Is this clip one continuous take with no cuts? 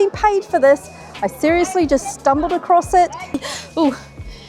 no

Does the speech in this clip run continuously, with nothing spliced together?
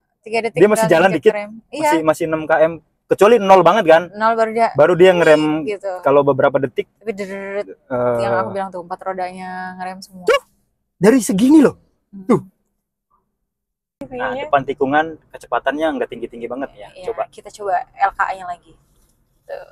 no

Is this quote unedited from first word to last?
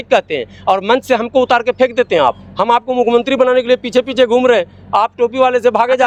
yes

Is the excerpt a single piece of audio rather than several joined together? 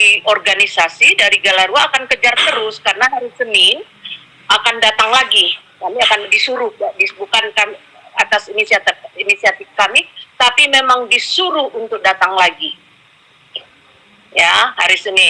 yes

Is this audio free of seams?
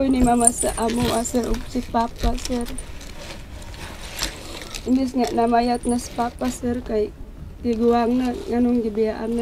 yes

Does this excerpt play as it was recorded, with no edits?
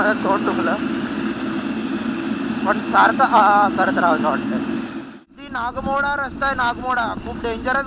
no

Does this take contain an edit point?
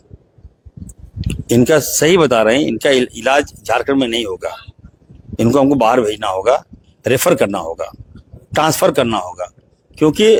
no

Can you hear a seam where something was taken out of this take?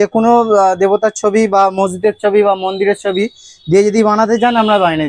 no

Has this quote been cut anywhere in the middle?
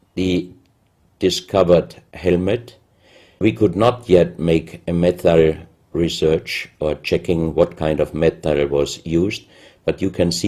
yes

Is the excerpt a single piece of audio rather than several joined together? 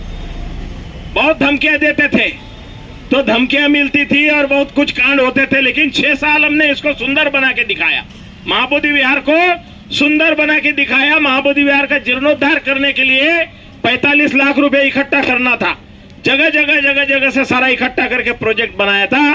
yes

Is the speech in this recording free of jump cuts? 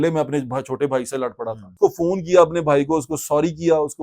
no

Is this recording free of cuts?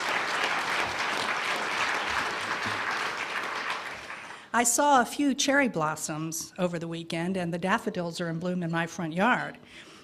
yes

